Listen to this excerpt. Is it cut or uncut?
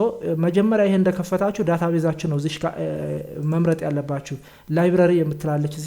uncut